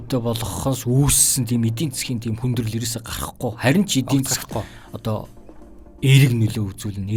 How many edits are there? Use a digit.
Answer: 0